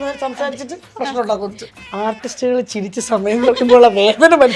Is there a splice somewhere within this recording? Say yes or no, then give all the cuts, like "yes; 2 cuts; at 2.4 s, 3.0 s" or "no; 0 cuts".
yes; 1 cut; at 1.6 s